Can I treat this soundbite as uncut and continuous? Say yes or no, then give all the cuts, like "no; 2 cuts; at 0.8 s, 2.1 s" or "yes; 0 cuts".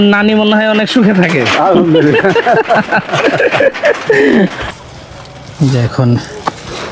no; 1 cut; at 4.6 s